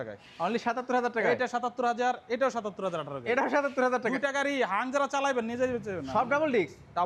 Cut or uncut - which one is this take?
uncut